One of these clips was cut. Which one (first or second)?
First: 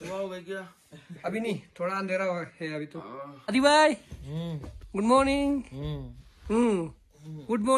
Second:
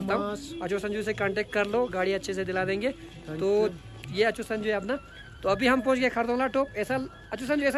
first